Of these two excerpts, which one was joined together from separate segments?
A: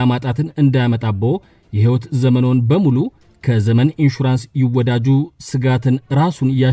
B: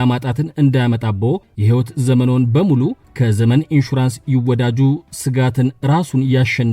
B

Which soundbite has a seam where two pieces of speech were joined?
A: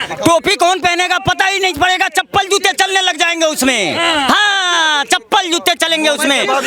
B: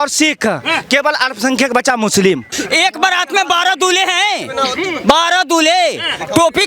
B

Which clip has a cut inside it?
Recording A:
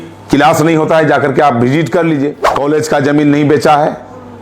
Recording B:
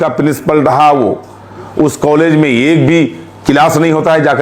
A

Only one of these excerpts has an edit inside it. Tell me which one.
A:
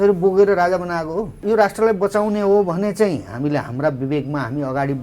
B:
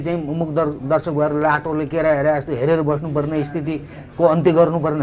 A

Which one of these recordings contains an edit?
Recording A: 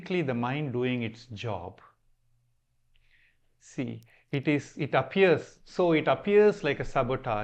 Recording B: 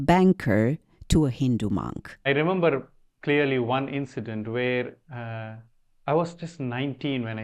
B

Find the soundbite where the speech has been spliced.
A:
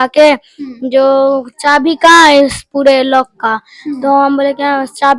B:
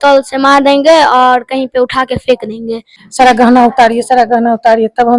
B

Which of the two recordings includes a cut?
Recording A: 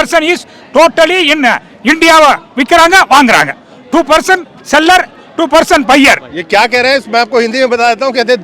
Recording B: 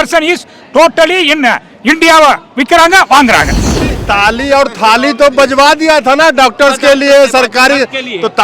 B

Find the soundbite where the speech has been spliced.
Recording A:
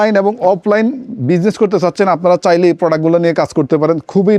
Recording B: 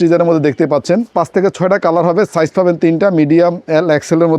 B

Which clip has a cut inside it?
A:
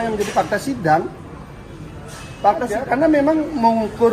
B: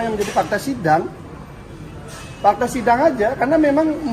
A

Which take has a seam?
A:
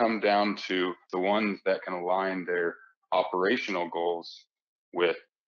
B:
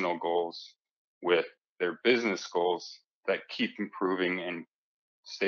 A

